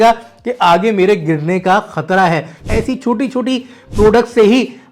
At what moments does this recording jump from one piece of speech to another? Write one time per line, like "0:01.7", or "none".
0:02.6